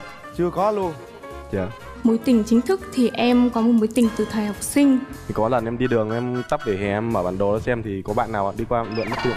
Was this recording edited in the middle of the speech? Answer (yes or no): yes